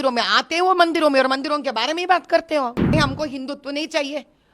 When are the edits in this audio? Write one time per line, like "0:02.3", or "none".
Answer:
0:02.9